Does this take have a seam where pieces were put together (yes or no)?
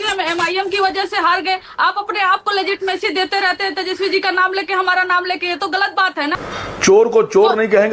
yes